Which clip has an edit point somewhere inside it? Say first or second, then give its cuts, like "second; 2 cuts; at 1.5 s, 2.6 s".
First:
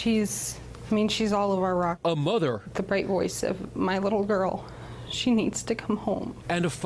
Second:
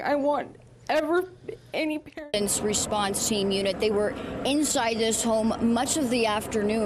second; 1 cut; at 2.2 s